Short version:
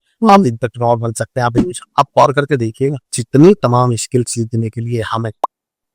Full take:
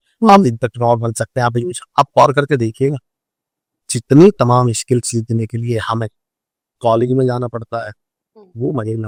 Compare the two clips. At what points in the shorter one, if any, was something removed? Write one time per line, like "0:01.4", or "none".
0:03.1